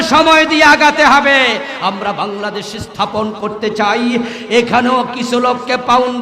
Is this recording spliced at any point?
yes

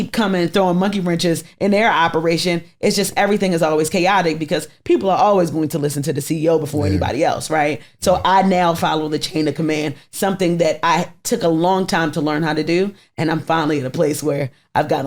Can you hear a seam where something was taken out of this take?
no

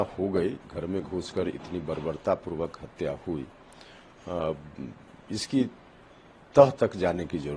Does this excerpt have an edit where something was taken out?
no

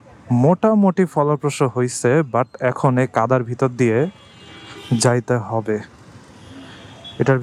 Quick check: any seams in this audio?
no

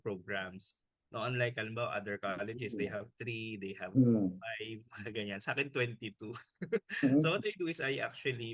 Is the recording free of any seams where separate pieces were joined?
yes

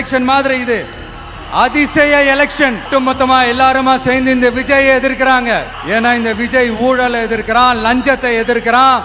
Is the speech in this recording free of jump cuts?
no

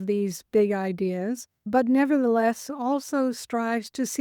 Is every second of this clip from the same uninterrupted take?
no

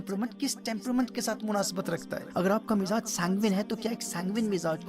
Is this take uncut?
no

